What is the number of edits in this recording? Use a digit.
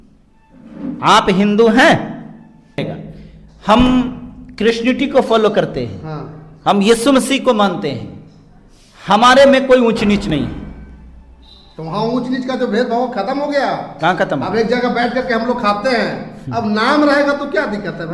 1